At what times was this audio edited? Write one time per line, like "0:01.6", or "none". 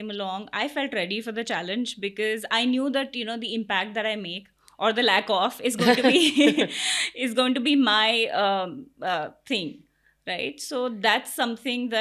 none